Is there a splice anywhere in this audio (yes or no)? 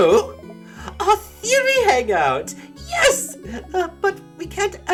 no